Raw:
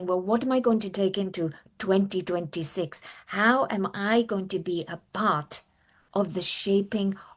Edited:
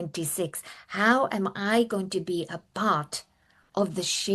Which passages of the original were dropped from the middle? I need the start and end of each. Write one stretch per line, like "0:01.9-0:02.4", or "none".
none